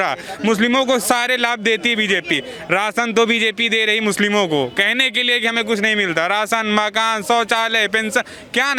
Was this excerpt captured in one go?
yes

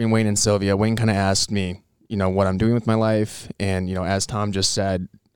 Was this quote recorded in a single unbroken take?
yes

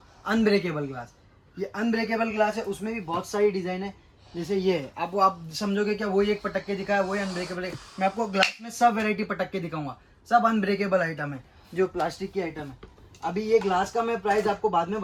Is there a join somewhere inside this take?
no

